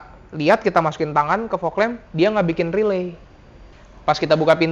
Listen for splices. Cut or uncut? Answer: cut